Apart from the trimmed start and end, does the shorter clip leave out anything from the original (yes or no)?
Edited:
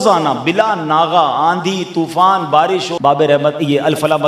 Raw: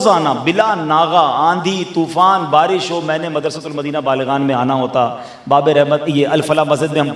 yes